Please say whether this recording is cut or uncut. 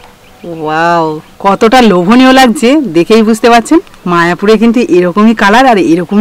cut